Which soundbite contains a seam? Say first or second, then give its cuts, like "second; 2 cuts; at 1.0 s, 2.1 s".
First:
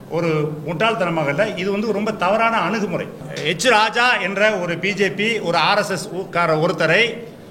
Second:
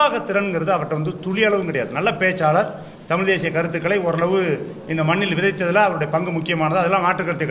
first; 1 cut; at 3.2 s